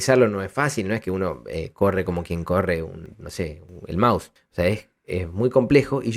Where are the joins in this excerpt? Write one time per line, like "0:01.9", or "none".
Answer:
0:03.5
0:04.4